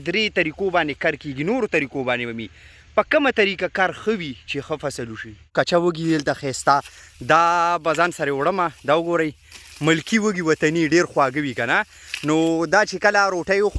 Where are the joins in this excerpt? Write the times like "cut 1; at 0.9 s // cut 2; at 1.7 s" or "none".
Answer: cut 1; at 5.5 s